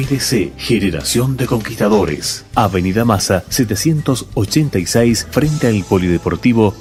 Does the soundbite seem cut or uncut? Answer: uncut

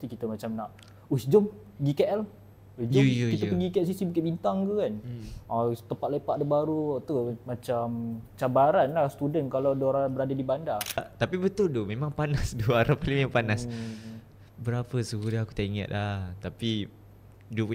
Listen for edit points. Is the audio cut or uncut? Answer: cut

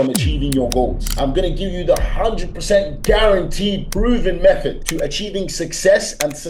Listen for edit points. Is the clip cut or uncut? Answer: cut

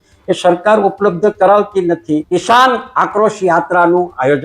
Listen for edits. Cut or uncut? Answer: cut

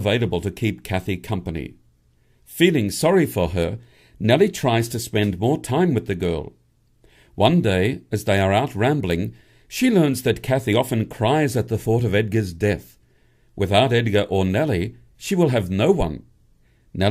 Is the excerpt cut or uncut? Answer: cut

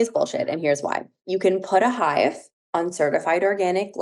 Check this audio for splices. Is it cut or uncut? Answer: uncut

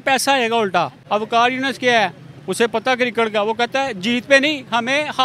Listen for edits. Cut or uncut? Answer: cut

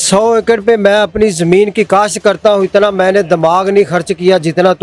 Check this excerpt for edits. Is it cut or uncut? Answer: uncut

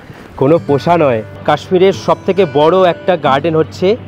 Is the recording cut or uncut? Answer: cut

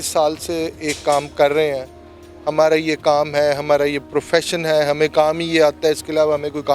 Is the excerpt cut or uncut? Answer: uncut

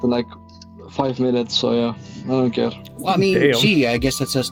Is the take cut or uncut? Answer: uncut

